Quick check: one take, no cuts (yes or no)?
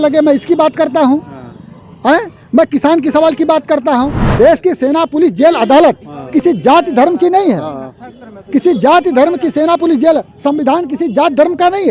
no